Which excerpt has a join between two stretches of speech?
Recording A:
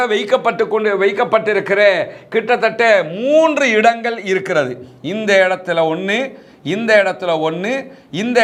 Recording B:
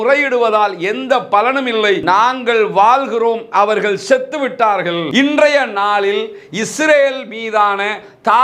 B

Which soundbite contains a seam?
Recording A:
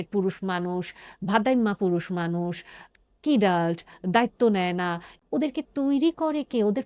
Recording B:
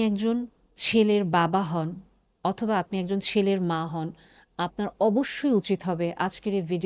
A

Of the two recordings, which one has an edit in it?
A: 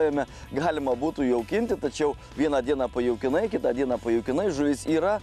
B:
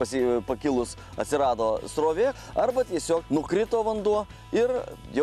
B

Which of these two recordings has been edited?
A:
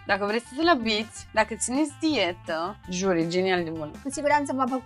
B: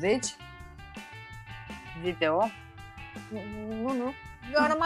A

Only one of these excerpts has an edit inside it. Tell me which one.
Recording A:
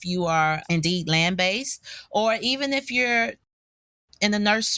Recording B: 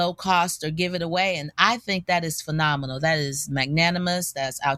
A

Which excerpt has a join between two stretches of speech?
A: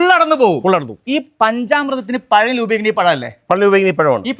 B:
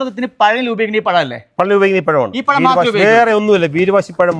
A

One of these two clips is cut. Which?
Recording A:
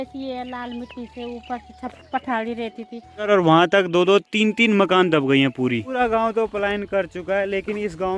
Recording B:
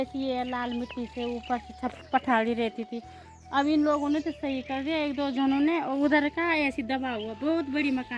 A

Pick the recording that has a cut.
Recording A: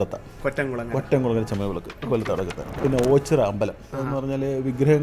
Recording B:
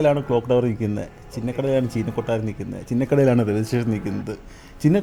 A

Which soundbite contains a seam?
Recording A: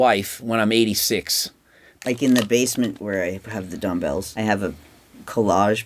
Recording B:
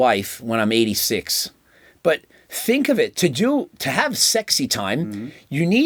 A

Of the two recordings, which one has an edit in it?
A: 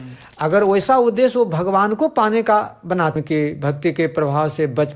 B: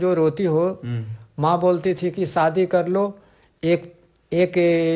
A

